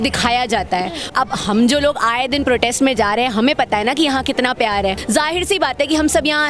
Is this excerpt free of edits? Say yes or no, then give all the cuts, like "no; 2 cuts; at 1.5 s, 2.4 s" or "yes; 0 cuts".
no; 2 cuts; at 1.1 s, 5.0 s